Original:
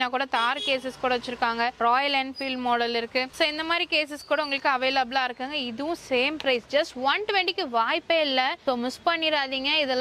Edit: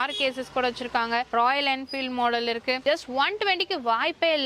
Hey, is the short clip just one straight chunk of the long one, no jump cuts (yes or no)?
no